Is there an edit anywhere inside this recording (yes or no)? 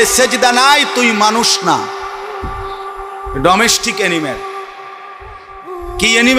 no